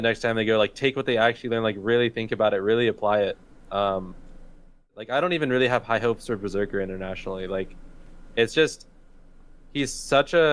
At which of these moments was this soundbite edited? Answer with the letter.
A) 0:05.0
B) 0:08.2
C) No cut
A